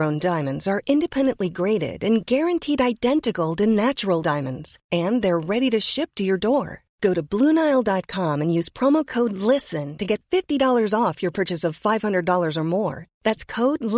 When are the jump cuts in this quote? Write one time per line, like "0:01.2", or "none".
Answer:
none